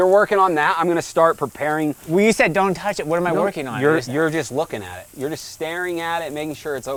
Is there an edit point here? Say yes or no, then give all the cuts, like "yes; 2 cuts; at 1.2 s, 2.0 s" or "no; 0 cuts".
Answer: no; 0 cuts